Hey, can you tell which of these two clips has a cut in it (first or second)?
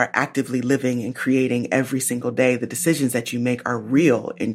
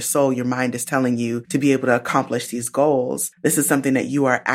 second